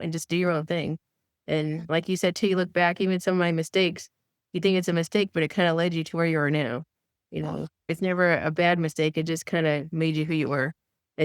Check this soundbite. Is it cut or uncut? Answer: cut